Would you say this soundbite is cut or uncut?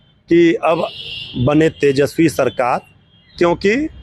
uncut